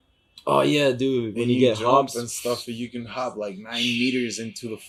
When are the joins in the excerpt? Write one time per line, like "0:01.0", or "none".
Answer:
none